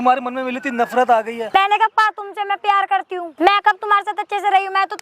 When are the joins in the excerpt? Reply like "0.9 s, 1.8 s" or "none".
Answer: 1.5 s, 3.2 s

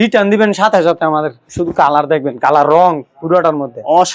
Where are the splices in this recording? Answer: 1.4 s

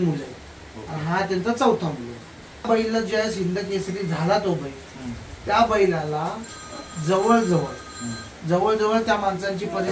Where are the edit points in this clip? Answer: 2.7 s

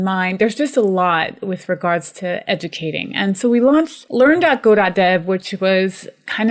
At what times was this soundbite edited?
4.0 s

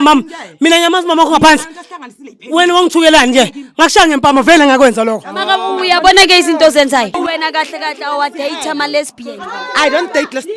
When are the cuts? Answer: 7.2 s

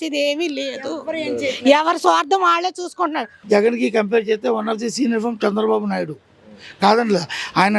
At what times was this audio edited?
3.3 s

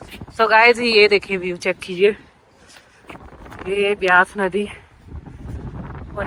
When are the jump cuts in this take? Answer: none

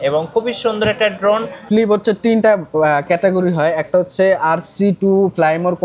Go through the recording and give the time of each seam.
1.6 s

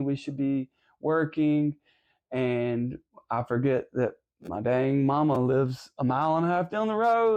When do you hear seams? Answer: none

